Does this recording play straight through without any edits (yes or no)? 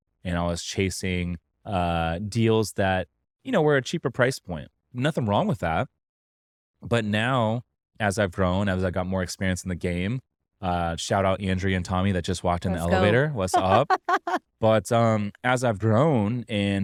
yes